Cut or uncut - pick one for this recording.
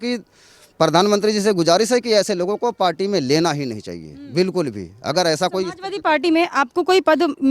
uncut